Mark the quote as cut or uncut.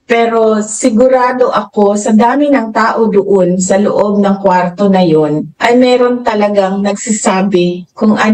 uncut